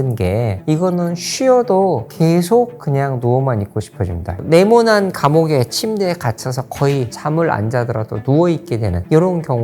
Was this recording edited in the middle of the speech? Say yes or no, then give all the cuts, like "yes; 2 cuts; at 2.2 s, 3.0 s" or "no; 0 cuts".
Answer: yes; 1 cut; at 4.4 s